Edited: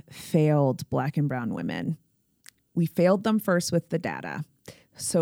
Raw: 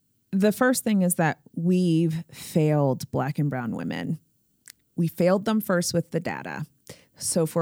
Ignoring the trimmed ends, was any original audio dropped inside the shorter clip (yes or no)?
no